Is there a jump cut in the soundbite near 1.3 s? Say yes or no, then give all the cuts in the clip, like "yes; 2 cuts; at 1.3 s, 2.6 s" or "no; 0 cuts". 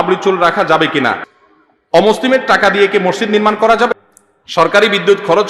yes; 2 cuts; at 1.3 s, 3.9 s